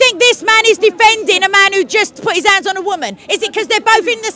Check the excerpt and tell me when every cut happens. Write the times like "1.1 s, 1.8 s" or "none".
none